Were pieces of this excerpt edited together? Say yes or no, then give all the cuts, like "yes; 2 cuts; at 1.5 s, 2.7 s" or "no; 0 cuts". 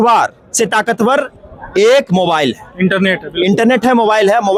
no; 0 cuts